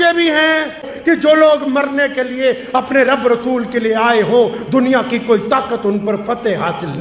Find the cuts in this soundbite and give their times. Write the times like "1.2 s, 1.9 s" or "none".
0.9 s